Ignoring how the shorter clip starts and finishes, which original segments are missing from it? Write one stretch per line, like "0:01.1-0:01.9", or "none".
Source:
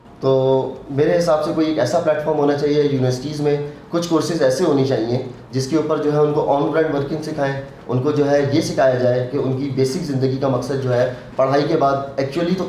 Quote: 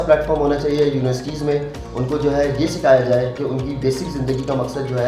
0:03.8-0:07.7